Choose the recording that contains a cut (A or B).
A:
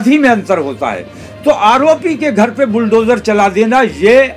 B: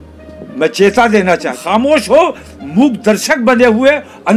B